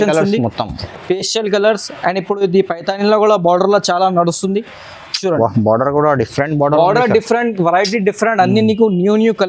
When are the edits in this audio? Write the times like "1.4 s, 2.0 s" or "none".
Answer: none